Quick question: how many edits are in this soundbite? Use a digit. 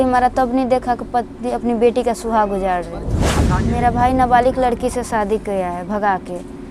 1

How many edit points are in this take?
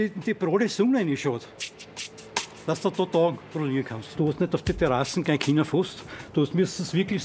1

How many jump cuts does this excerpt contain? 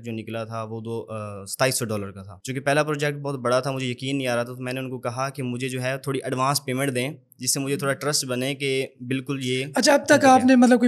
0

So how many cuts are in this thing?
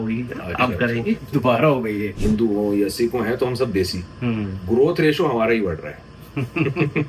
1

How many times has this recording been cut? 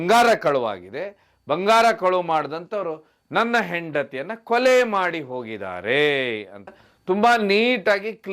1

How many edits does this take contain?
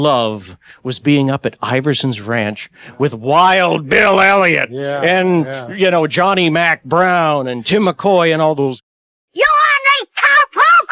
1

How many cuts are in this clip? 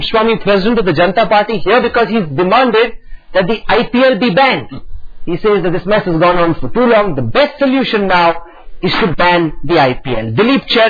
1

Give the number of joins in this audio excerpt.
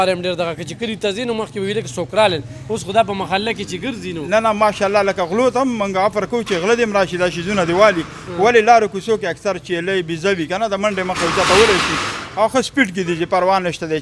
0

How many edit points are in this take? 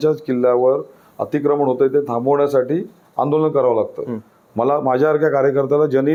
0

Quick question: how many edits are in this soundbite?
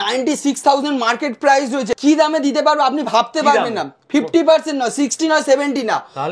1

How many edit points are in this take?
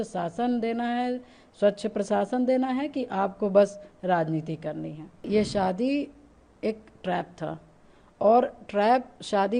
1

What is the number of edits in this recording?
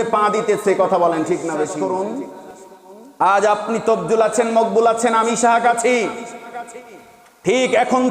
1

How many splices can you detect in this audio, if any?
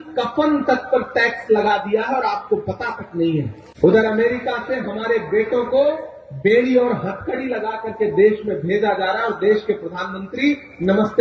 1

